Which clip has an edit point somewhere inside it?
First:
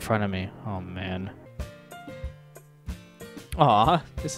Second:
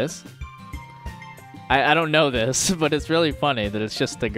first; 1 cut; at 1.5 s

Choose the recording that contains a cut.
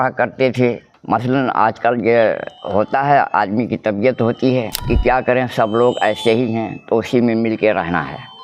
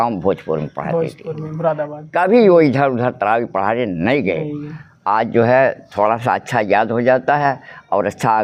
first; 2 cuts; at 0.9 s, 4.8 s

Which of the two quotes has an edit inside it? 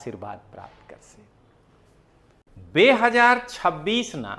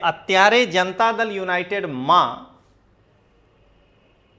first; 1 cut; at 2.4 s

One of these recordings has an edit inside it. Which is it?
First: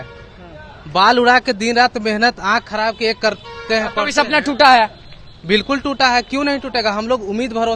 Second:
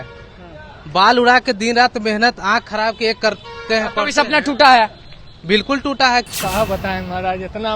second; 1 cut; at 6.3 s

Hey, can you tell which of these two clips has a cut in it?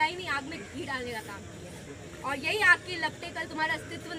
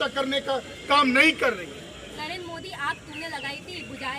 second; 1 cut; at 2.2 s

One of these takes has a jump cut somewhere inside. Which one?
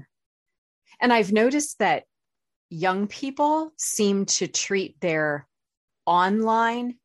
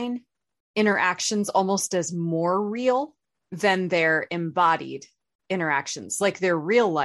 second; 1 cut; at 3.4 s

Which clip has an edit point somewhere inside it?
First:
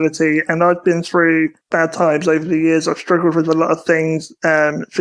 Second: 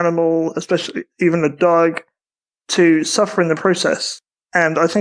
first; 1 cut; at 1.6 s

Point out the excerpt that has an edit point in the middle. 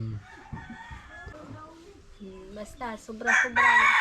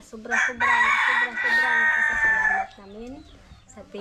first; 1 cut; at 1.3 s

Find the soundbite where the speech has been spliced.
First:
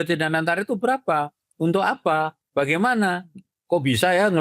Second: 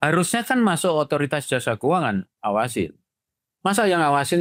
first; 1 cut; at 2.4 s

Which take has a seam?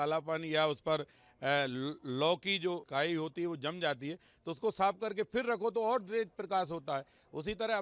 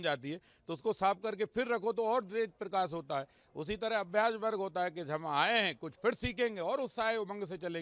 first; 1 cut; at 2.8 s

